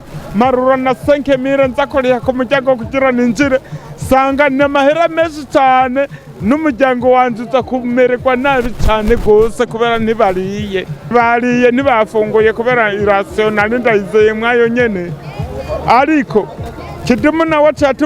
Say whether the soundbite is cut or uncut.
cut